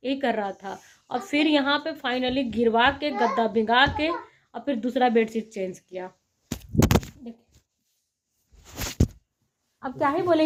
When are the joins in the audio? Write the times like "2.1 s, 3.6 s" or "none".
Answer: none

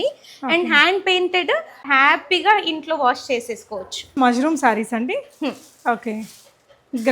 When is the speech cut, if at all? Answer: 1.8 s, 4.1 s

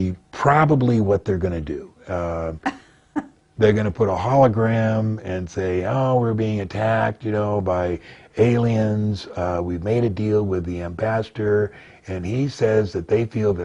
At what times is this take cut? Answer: none

